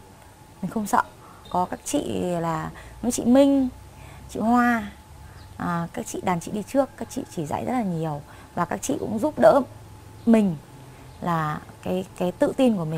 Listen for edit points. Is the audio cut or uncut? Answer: cut